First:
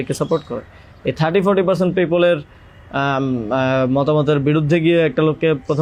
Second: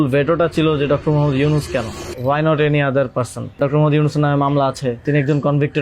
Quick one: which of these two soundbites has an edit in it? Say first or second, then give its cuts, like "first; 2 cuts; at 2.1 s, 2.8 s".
second; 3 cuts; at 2.0 s, 3.6 s, 5.0 s